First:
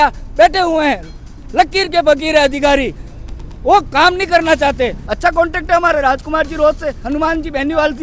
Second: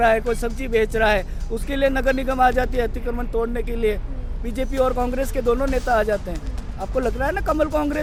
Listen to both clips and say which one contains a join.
first; 2 cuts; at 5.0 s, 7.0 s

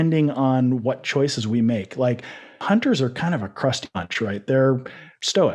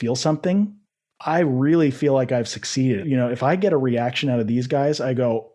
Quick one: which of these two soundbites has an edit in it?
second; 2 cuts; at 1.2 s, 3.0 s

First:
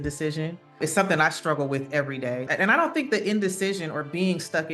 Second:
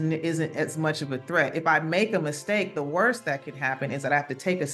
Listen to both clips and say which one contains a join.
first; 2 cuts; at 0.8 s, 2.5 s

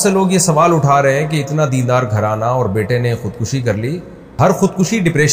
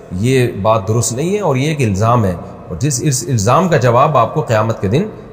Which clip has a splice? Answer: first; 1 cut; at 4.4 s

